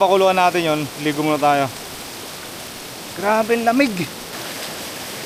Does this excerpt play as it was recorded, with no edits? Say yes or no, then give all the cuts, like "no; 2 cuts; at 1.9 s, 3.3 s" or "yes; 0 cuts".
no; 1 cut; at 4.3 s